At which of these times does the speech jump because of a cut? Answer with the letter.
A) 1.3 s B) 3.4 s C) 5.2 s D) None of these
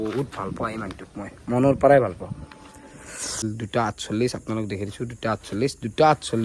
B